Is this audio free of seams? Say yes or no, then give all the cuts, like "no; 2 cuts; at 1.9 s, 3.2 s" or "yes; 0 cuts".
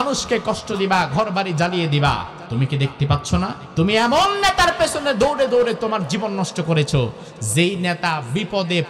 no; 2 cuts; at 2.4 s, 3.6 s